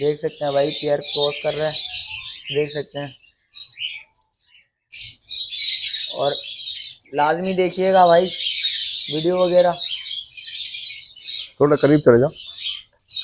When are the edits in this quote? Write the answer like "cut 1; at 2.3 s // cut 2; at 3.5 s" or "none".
none